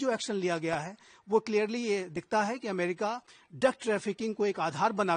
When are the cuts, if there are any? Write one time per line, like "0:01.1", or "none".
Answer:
none